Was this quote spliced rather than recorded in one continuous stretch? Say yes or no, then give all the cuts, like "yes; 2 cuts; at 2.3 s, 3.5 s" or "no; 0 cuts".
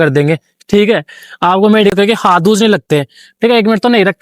yes; 1 cut; at 1.9 s